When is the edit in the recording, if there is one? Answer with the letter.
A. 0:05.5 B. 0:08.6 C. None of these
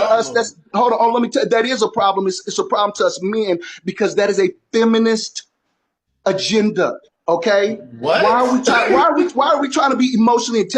C